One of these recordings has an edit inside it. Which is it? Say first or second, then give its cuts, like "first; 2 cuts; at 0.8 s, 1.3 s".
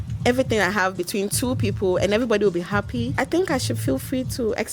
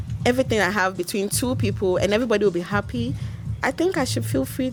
first; 1 cut; at 3.1 s